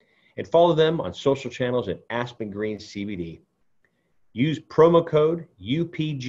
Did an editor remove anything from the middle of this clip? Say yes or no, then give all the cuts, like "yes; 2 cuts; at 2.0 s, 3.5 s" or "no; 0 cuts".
no; 0 cuts